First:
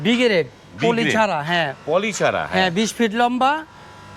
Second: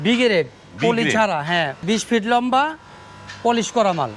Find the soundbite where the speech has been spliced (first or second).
second